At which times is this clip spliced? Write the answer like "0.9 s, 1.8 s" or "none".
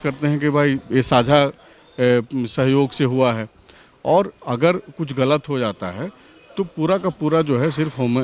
none